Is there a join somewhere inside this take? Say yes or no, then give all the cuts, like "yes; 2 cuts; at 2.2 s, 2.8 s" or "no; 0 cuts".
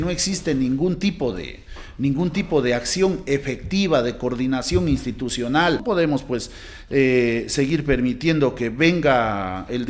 yes; 1 cut; at 5.8 s